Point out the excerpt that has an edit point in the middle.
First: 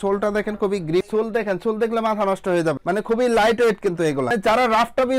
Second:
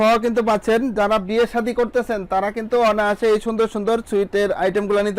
first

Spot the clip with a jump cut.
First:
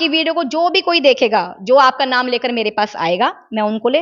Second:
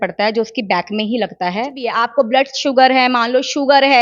second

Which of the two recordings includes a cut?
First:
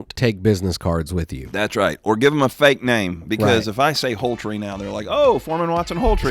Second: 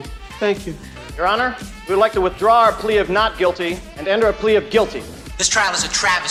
first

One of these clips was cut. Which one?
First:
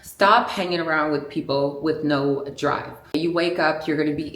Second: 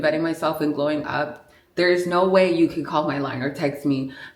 first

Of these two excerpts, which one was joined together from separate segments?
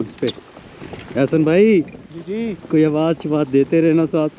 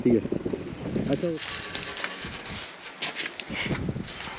second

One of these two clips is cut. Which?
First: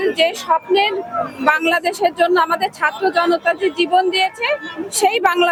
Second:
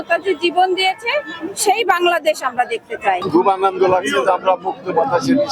second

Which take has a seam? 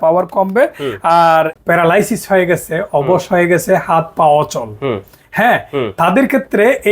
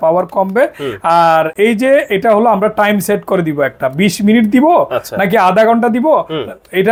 first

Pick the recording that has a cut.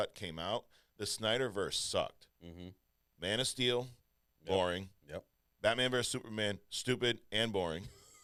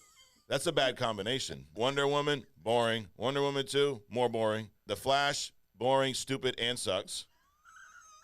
second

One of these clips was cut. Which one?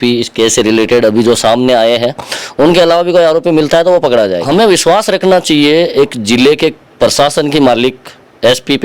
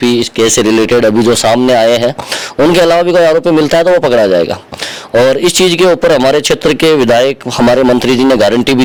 first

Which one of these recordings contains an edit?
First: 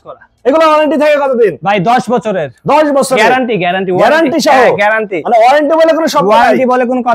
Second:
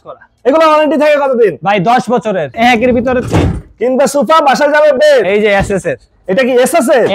second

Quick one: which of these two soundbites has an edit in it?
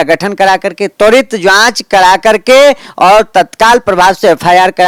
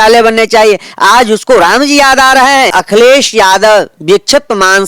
second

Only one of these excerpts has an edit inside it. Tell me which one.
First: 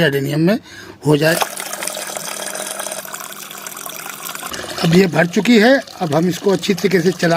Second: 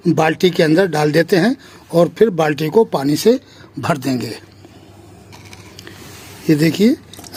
first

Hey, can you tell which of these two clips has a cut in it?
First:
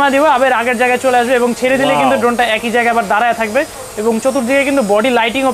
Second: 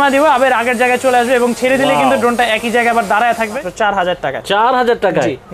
second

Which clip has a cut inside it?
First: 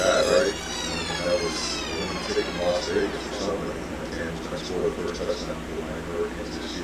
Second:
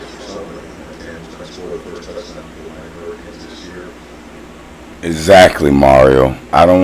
second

